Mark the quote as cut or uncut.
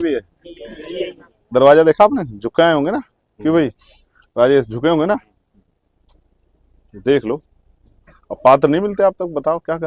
uncut